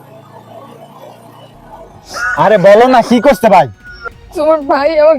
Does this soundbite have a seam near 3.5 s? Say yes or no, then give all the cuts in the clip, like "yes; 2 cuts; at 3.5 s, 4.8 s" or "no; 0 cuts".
no; 1 cut; at 2.0 s